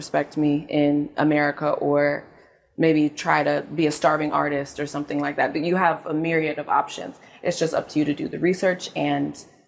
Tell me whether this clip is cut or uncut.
uncut